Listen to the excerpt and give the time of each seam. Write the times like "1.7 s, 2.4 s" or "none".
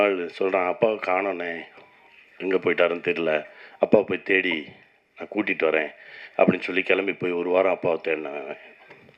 none